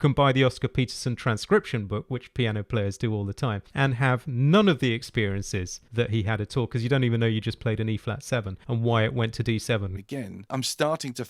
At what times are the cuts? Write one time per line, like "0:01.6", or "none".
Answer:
0:10.0